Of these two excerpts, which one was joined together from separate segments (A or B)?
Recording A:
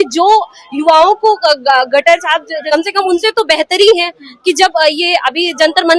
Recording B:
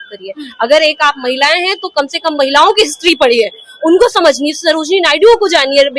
A